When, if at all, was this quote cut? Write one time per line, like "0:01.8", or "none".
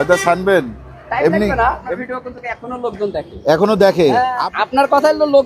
0:01.8
0:04.4